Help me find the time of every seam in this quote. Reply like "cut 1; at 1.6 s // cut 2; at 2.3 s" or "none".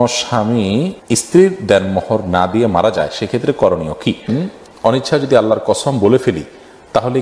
cut 1; at 1.0 s // cut 2; at 4.3 s